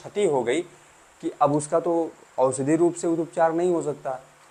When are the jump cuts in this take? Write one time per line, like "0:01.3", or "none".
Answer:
none